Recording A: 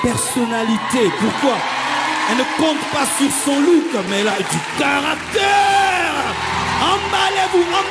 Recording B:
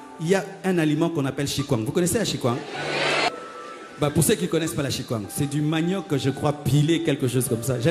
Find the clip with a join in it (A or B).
B